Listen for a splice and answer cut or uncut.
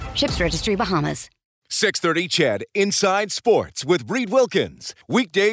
cut